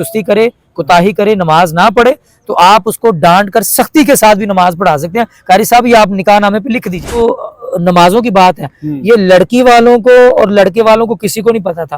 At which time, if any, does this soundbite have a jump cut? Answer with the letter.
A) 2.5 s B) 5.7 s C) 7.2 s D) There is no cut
C